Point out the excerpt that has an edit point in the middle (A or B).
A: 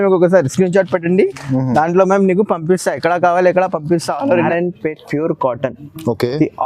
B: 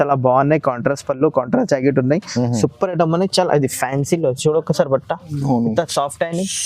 A